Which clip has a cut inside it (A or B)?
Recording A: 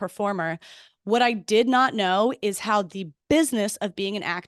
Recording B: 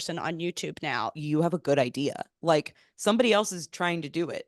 B